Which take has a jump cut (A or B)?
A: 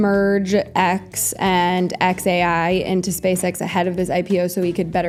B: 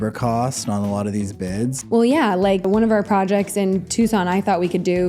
B